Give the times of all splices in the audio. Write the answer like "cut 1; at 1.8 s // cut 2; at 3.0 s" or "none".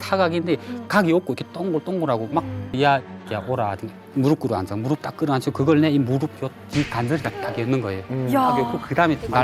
cut 1; at 2.7 s

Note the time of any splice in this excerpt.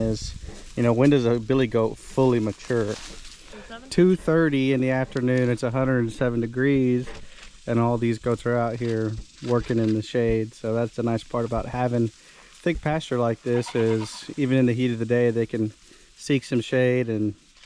cut 1; at 3.4 s

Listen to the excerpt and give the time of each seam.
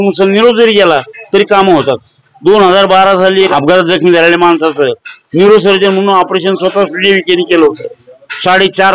cut 1; at 3.5 s

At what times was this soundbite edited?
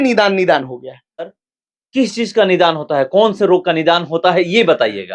cut 1; at 1.3 s

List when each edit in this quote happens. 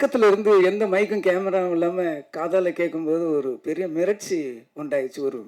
none

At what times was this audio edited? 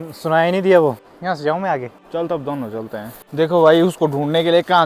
cut 1; at 1.1 s // cut 2; at 2.0 s // cut 3; at 3.2 s

